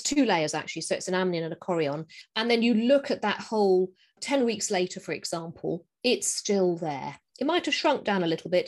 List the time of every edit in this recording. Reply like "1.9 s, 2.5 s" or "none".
4.2 s